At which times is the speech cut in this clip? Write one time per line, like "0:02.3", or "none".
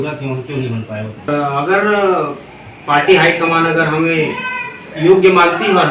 0:01.3